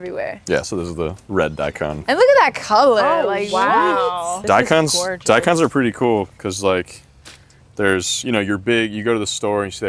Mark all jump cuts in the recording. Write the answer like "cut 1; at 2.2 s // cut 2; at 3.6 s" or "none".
cut 1; at 4.4 s